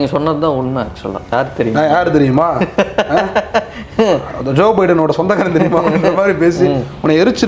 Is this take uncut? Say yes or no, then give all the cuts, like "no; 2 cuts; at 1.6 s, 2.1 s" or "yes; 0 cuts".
no; 1 cut; at 1.3 s